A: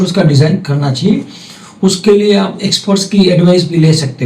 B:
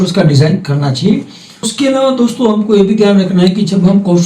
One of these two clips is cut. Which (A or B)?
B